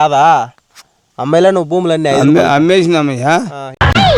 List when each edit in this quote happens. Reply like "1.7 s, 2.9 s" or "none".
none